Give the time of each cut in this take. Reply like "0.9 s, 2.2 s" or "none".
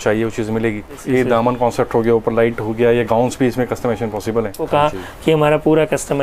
1.0 s, 4.6 s